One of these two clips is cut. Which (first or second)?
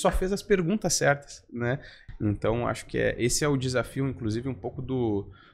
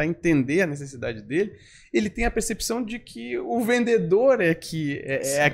first